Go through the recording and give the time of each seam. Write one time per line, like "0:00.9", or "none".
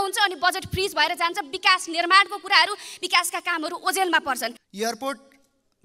0:04.6